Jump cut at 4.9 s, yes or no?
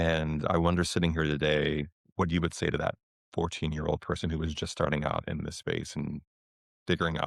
no